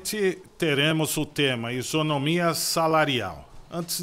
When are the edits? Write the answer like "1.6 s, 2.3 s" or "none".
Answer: none

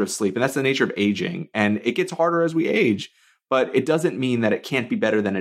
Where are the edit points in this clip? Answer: none

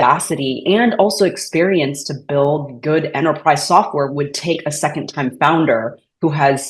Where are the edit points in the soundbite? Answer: none

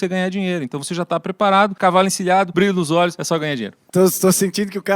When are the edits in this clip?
1.7 s, 2.5 s, 3.3 s

